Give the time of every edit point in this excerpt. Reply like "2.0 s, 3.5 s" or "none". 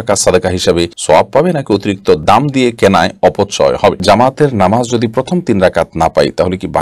1.0 s, 2.2 s, 4.0 s